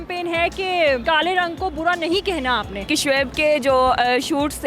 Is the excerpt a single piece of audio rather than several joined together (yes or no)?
no